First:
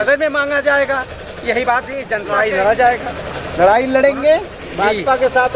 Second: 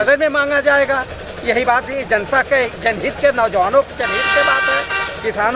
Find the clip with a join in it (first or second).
first